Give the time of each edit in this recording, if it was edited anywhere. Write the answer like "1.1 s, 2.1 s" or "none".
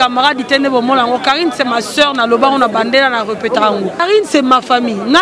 4.0 s